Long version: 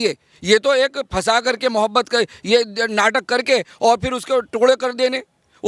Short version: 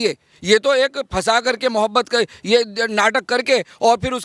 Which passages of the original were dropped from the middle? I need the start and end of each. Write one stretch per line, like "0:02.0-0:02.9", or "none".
none